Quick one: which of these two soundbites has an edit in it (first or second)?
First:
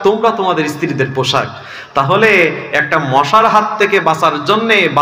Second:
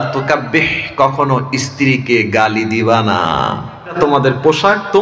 second